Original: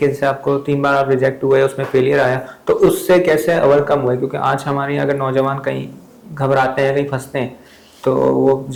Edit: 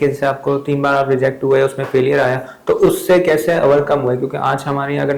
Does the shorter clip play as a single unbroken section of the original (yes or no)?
yes